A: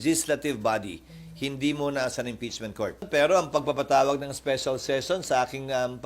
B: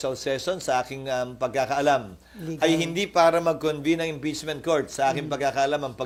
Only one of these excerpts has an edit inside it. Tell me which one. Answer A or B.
A